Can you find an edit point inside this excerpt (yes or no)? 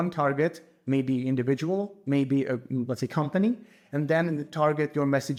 no